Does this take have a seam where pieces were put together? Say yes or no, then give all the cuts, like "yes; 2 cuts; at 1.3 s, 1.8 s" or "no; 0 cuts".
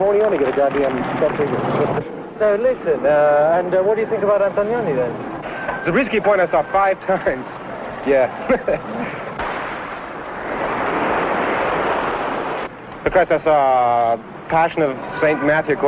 yes; 1 cut; at 3.3 s